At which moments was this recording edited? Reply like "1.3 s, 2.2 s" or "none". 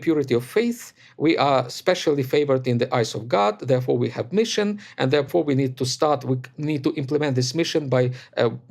5.3 s